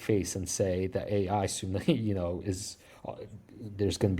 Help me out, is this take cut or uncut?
uncut